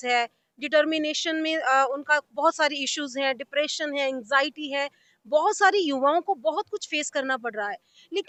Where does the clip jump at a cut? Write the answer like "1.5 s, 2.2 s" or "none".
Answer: none